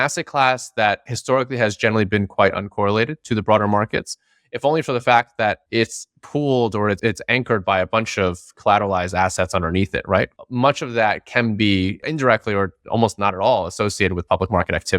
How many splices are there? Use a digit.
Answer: 4